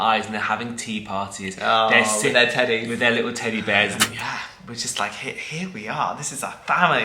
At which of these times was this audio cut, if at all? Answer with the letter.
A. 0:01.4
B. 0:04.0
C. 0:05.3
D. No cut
B